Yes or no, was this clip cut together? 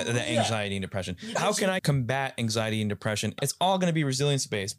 yes